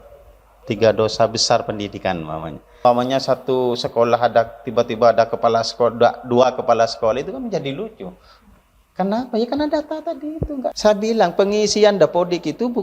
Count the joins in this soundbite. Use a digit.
2